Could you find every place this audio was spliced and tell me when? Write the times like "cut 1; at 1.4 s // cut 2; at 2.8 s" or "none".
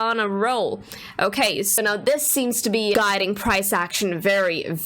cut 1; at 2.9 s